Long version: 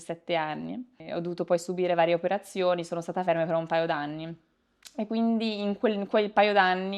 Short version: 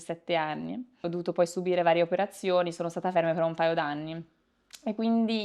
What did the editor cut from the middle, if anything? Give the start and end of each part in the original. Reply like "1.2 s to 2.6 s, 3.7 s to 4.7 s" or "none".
0.9 s to 1.1 s